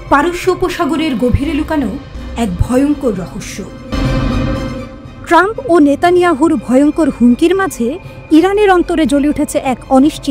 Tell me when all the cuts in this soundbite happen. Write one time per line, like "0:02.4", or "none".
0:03.9